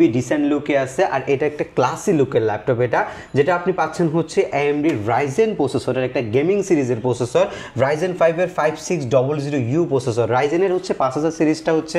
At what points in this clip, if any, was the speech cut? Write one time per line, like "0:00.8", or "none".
none